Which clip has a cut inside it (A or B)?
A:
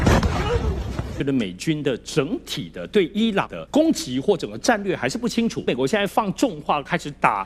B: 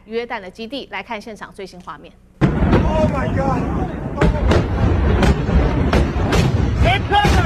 A